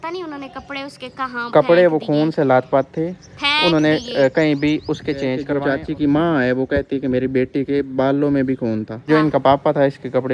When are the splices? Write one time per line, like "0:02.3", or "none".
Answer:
0:05.5
0:09.1